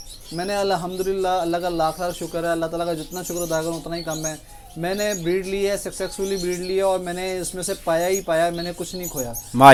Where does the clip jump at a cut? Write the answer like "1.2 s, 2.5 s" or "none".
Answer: none